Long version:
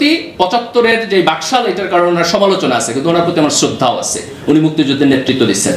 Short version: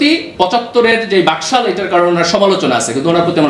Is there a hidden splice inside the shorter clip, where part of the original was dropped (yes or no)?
no